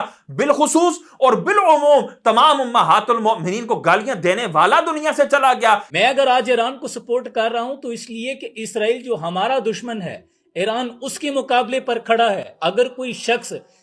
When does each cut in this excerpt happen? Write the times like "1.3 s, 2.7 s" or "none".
5.9 s